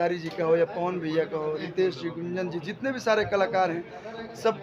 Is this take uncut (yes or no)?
yes